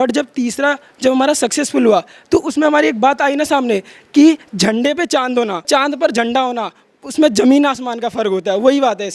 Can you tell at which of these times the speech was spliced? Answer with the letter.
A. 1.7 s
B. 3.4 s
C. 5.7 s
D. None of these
C